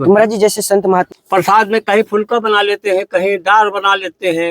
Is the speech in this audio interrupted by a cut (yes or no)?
yes